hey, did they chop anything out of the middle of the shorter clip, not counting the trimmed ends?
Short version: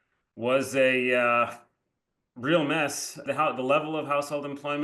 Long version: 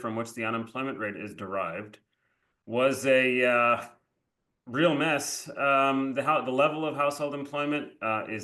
yes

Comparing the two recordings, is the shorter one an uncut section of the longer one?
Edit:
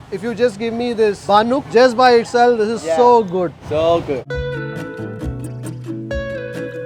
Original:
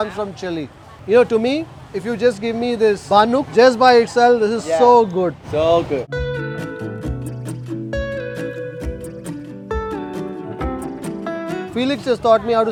yes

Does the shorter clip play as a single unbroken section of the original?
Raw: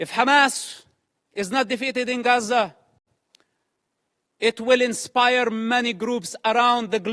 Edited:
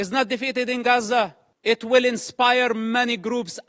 no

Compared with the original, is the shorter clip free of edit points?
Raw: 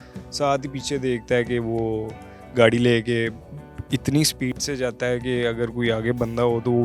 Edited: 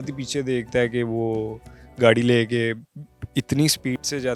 yes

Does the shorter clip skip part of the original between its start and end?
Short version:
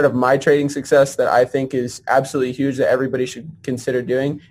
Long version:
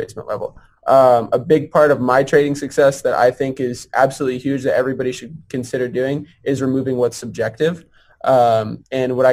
no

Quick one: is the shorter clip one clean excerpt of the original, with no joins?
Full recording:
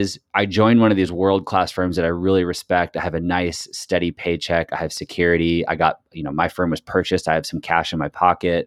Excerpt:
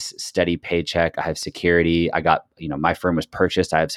yes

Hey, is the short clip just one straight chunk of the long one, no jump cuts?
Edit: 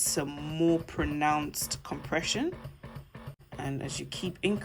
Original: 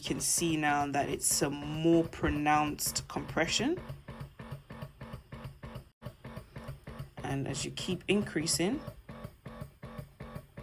no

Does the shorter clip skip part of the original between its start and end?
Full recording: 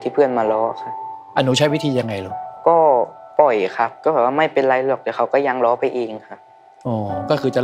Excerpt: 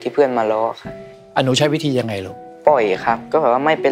yes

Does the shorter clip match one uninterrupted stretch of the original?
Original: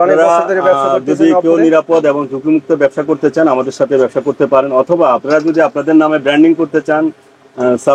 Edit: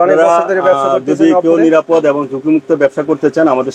yes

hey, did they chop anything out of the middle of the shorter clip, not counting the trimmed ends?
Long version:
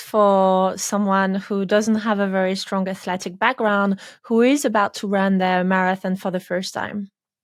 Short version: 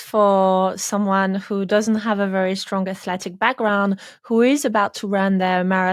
no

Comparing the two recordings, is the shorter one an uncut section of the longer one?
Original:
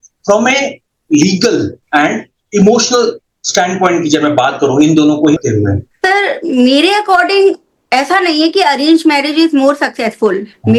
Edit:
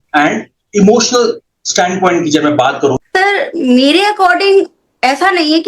no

